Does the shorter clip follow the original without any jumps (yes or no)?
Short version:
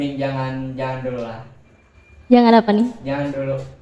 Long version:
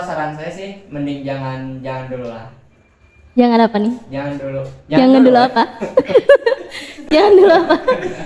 yes